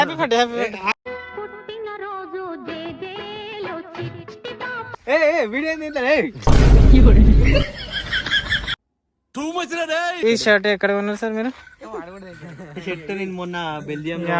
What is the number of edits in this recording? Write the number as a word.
two